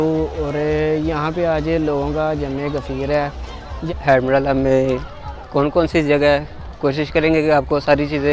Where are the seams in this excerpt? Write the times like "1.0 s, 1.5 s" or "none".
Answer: 3.9 s